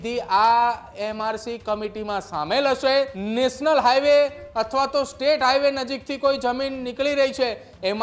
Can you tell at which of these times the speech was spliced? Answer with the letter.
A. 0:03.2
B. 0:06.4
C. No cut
A